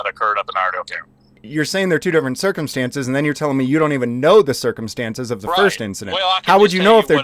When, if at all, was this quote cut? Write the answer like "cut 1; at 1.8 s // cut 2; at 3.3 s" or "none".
cut 1; at 1.4 s